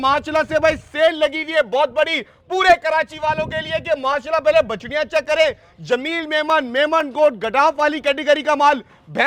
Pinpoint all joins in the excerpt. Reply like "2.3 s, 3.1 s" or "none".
none